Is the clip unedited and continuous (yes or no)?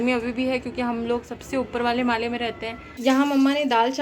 no